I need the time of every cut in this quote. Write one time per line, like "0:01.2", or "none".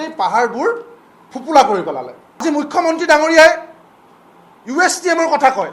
0:02.4

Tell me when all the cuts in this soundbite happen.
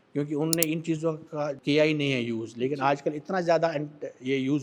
0:01.6

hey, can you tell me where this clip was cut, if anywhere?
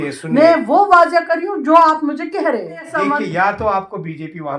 0:02.9

